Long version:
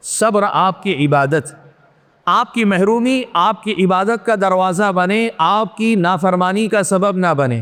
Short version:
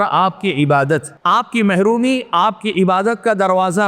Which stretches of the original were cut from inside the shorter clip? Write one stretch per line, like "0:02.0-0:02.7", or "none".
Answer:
0:01.5-0:02.1